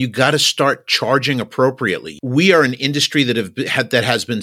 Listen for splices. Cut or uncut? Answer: cut